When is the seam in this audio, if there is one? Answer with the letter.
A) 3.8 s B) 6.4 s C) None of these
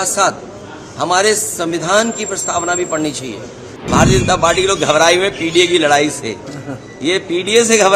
A